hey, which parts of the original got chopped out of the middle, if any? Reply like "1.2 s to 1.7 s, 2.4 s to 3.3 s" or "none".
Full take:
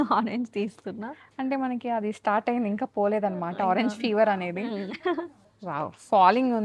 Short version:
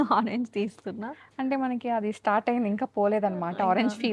none